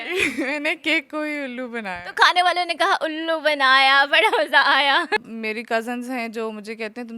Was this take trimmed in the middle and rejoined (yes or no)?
yes